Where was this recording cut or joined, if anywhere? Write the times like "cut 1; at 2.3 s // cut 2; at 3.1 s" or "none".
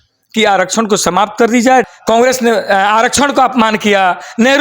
cut 1; at 1.9 s